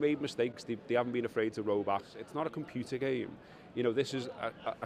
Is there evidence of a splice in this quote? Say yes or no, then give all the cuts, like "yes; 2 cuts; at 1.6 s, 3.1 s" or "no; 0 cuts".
yes; 1 cut; at 2.2 s